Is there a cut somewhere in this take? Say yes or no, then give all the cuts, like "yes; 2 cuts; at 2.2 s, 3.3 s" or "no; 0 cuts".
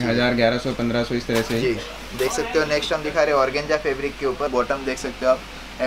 yes; 1 cut; at 4.5 s